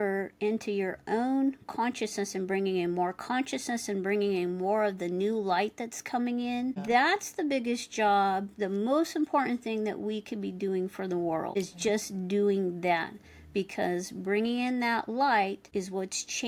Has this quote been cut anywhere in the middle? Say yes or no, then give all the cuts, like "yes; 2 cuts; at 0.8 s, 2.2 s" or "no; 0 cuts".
no; 0 cuts